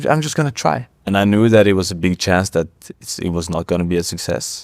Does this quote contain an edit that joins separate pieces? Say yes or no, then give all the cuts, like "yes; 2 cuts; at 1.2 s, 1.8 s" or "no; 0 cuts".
no; 0 cuts